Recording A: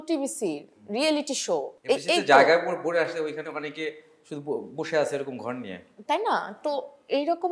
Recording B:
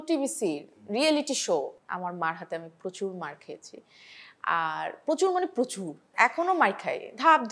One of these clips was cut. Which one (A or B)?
B